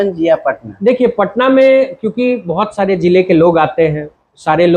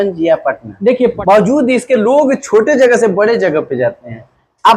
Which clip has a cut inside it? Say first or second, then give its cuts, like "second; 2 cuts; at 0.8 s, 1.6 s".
second; 1 cut; at 1.2 s